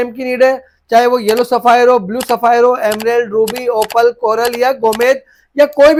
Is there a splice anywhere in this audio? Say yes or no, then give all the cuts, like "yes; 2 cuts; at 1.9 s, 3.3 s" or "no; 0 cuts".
no; 0 cuts